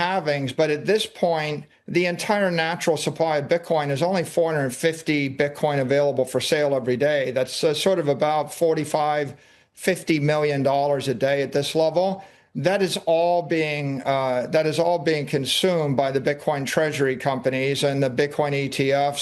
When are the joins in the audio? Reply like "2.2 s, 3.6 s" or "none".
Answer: none